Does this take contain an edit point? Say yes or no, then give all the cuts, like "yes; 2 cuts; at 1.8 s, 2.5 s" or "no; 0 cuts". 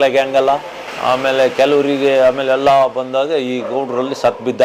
no; 0 cuts